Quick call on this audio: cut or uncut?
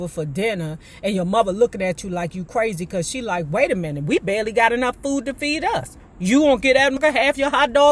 cut